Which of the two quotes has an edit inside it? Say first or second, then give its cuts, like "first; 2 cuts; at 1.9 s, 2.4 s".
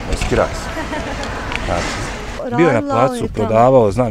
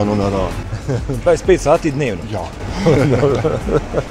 first; 1 cut; at 2.4 s